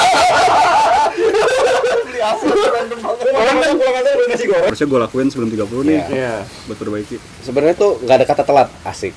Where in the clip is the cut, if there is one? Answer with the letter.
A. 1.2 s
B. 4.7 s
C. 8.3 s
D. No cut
B